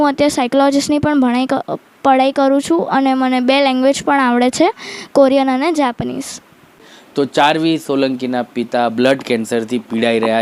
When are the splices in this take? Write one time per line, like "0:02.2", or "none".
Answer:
0:06.9